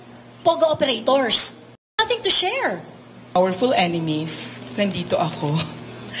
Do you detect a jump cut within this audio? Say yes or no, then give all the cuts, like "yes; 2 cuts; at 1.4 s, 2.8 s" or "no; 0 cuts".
yes; 1 cut; at 3.4 s